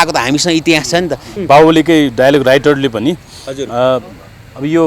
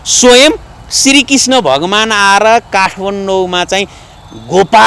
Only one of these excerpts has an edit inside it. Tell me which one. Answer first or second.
first